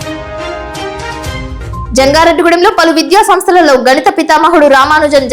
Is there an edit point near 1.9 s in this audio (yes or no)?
yes